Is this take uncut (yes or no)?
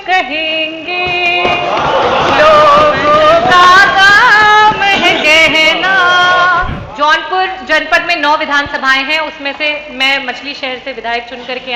no